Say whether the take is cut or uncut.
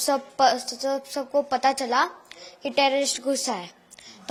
uncut